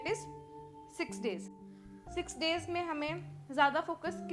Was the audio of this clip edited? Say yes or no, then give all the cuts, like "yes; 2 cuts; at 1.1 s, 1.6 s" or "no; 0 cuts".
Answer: no; 0 cuts